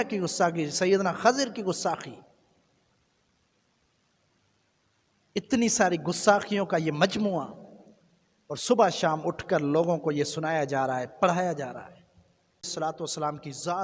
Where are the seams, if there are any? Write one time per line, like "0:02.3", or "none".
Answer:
0:12.7